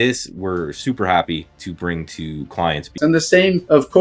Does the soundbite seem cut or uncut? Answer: cut